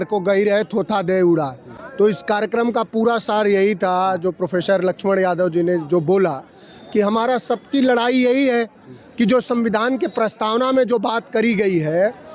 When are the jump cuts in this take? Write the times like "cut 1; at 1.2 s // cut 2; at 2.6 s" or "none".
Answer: none